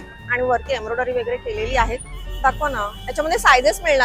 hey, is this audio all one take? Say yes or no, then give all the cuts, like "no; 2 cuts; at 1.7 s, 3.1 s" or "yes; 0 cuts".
yes; 0 cuts